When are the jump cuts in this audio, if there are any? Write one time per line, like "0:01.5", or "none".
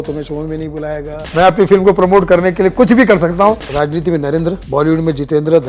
0:01.2
0:03.7
0:04.6